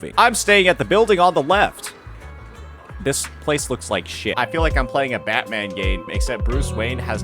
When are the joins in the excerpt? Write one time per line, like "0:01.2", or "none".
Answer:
0:04.3